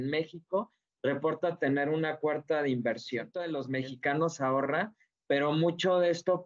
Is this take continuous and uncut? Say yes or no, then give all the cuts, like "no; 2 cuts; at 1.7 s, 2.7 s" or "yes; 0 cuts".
no; 1 cut; at 3.4 s